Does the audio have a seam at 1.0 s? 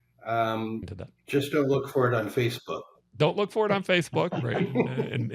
yes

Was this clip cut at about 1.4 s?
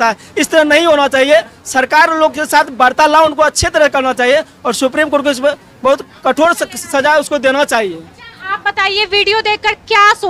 no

